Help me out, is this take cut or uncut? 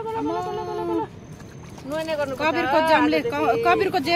uncut